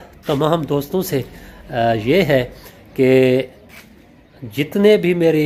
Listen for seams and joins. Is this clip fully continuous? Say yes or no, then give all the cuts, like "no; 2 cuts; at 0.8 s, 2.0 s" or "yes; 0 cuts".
yes; 0 cuts